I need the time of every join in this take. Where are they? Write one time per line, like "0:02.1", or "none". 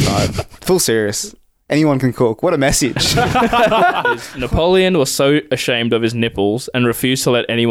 0:04.3